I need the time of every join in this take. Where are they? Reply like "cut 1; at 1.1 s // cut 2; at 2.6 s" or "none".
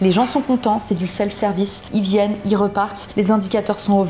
cut 1; at 1.8 s // cut 2; at 3.0 s